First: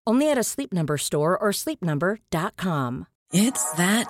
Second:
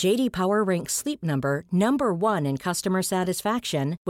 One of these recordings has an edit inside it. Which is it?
first; 1 cut; at 3.1 s

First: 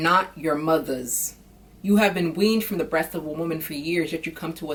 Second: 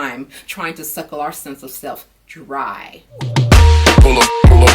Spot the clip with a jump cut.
second; 1 cut; at 3.3 s

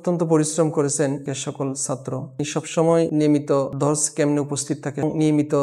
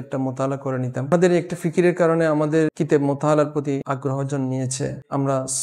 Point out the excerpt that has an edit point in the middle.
second; 3 cuts; at 1.1 s, 2.7 s, 3.8 s

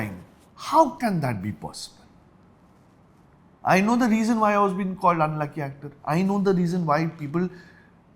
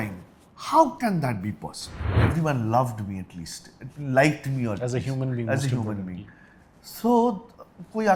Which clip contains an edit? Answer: second; 1 cut; at 2.2 s

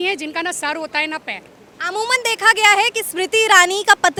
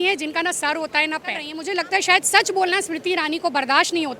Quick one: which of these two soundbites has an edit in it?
second; 1 cut; at 1.6 s

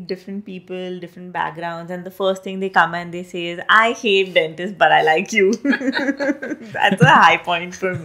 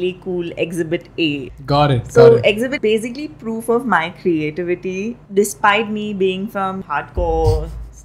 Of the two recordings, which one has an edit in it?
second; 4 cuts; at 1.5 s, 2.8 s, 5.2 s, 6.8 s

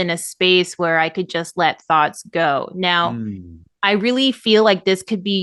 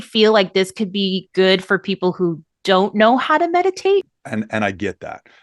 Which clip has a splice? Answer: second; 1 cut; at 4.1 s

